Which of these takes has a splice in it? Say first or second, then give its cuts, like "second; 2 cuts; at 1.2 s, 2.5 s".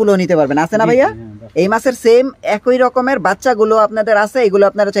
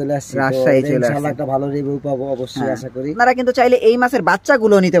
second; 1 cut; at 3.1 s